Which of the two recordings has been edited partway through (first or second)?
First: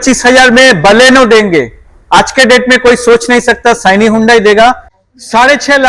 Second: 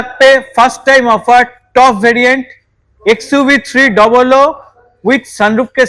first